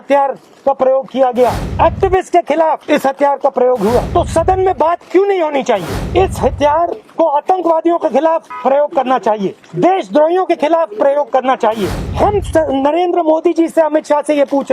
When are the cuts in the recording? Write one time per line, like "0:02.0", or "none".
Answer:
0:01.6
0:02.8
0:04.1
0:06.0
0:07.0
0:08.5
0:09.6
0:12.0

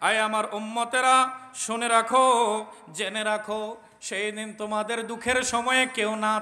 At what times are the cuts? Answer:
none

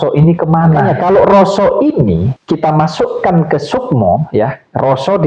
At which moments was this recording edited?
0:00.9
0:02.3

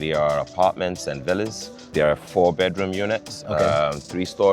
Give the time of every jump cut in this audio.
0:01.9

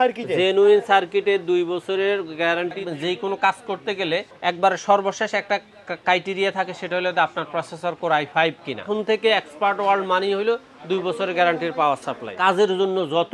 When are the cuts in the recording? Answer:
0:02.8
0:04.3
0:08.9
0:12.3

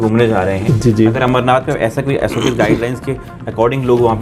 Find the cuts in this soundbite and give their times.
none

